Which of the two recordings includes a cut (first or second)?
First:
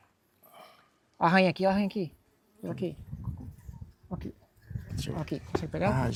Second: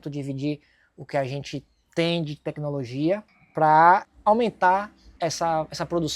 second